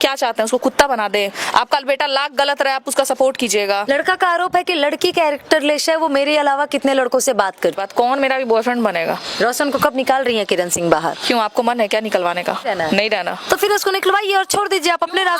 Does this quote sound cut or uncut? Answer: cut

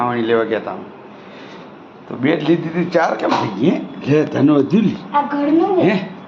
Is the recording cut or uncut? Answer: uncut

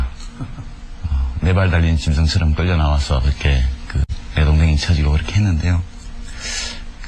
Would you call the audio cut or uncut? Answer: cut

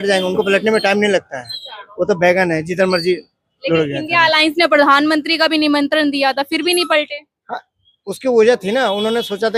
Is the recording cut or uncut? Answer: uncut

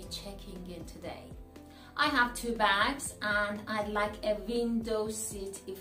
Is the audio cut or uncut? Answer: cut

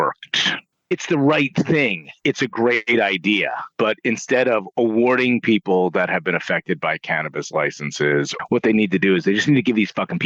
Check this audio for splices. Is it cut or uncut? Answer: cut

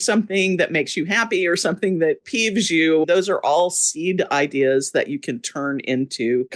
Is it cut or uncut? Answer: cut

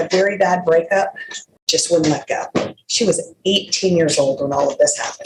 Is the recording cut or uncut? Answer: uncut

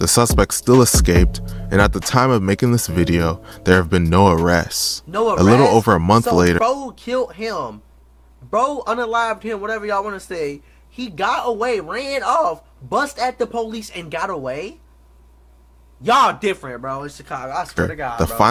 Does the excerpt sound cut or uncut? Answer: uncut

